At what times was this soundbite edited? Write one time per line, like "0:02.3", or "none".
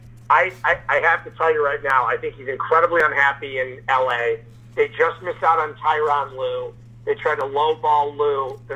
none